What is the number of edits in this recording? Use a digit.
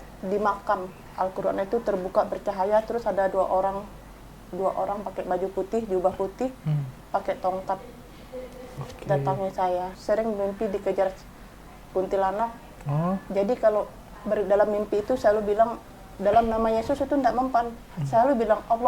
2